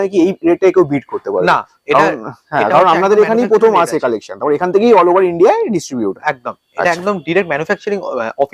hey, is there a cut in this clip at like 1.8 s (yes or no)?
no